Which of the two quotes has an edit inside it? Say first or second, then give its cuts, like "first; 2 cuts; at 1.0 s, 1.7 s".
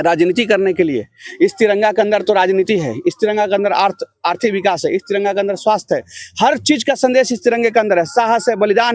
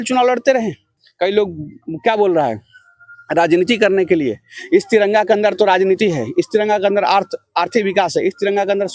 second; 1 cut; at 1.0 s